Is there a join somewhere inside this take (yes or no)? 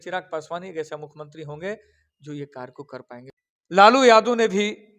yes